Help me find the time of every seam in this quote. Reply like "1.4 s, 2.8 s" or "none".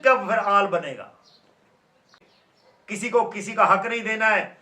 2.3 s

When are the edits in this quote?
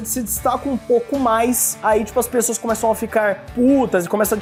none

